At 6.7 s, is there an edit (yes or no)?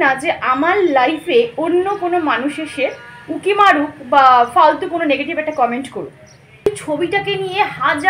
yes